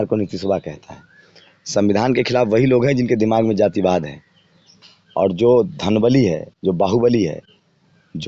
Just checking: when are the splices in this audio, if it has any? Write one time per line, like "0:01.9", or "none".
0:04.8